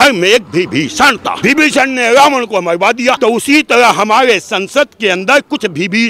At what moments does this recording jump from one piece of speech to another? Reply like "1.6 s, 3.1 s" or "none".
1.3 s, 3.2 s